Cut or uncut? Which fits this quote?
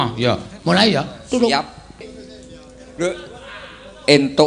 cut